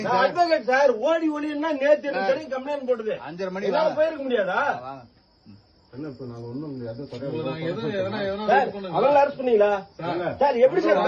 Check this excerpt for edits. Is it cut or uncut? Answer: uncut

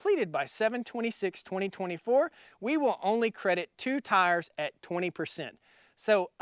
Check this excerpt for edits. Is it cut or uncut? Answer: uncut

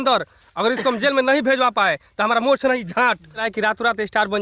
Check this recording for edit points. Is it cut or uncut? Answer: cut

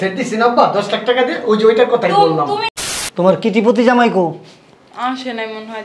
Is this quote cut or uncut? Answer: cut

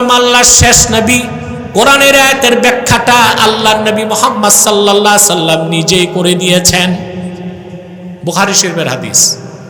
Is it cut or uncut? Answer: uncut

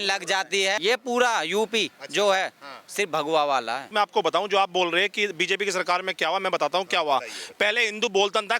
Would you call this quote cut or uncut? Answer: cut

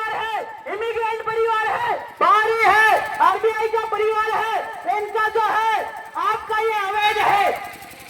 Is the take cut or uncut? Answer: uncut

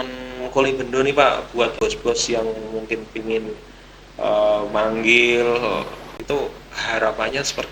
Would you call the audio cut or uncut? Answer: cut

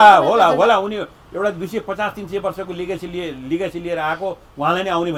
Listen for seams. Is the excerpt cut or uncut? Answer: uncut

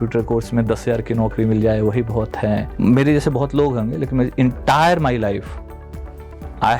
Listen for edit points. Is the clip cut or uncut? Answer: cut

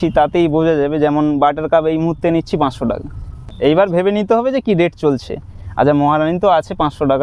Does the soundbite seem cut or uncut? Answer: cut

